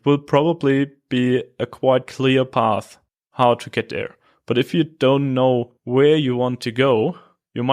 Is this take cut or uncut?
cut